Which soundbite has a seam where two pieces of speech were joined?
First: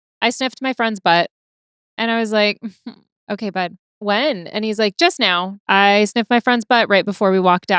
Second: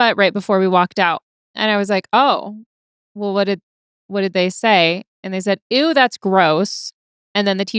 first; 3 cuts; at 3.1 s, 3.9 s, 5.5 s

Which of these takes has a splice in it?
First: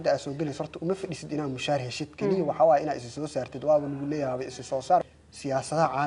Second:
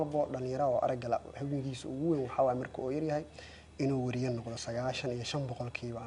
first; 1 cut; at 5.0 s

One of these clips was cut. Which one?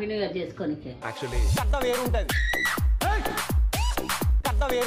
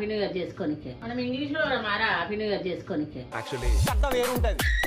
second; 2 cuts; at 0.9 s, 3.2 s

